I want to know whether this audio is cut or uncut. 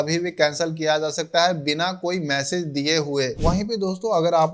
cut